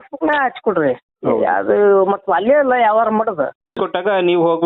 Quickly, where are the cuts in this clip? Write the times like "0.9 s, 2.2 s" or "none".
3.8 s